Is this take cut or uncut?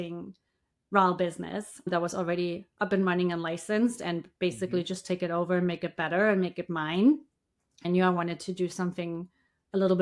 cut